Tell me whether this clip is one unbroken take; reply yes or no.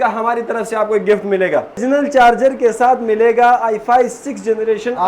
no